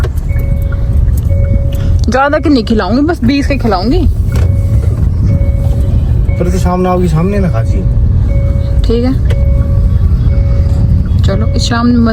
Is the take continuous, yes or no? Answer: yes